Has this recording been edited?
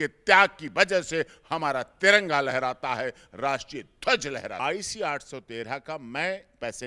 yes; 1 cut; at 4.6 s

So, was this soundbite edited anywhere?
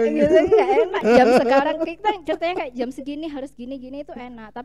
yes; 1 cut; at 1.0 s

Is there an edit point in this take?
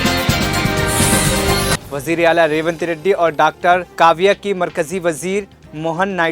yes; 1 cut; at 1.8 s

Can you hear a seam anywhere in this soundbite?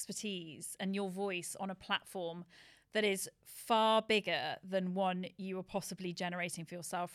no; 0 cuts

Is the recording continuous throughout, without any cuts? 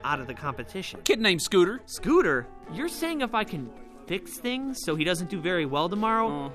no; 2 cuts; at 0.9 s, 2.6 s

